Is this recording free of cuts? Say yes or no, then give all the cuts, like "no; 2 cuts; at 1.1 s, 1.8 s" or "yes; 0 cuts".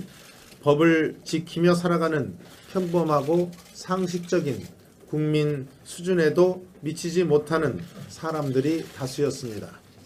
yes; 0 cuts